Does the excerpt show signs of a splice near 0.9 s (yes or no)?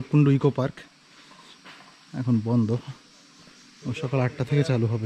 no